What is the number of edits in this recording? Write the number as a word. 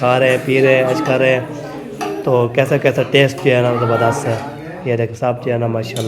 zero